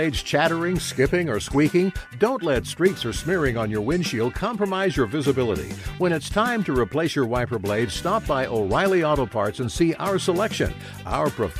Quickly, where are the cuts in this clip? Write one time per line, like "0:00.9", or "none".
none